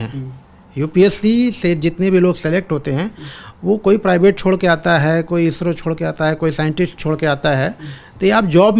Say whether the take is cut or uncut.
uncut